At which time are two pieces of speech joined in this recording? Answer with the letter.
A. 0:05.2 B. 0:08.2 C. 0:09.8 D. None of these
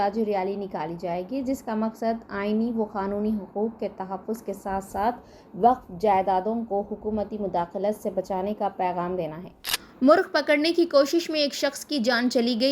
C